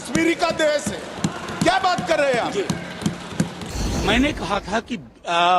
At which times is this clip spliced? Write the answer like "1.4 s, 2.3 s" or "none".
3.6 s